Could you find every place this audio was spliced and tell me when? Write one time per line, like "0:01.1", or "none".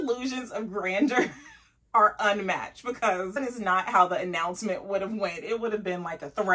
0:03.4